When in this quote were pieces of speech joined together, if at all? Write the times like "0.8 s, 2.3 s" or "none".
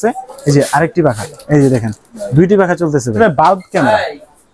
3.1 s

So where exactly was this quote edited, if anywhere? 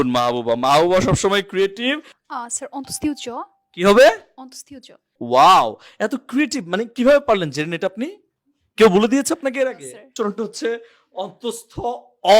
2.1 s, 5.1 s, 10.1 s

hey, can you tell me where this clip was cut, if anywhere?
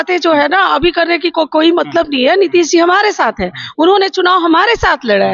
none

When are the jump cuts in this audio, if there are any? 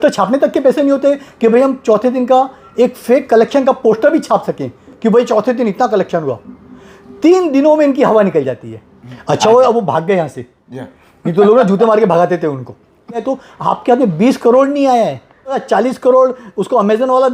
9.1 s, 13.2 s, 15.6 s

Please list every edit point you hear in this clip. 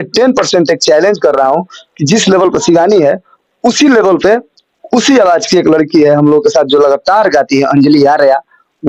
none

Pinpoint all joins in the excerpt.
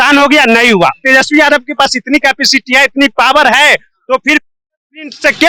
1.0 s

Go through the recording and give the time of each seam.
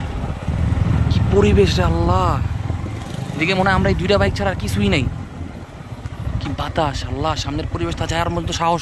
none

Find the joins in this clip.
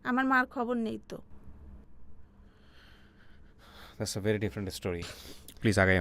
none

